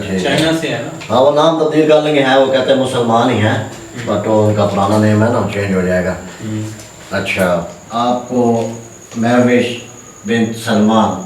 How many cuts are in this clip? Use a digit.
1